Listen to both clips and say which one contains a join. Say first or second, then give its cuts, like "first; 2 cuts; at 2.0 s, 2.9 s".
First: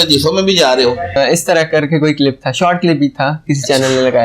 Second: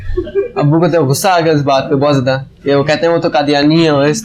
first; 1 cut; at 1.2 s